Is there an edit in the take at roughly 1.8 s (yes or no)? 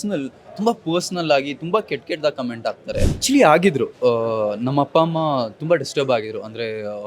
no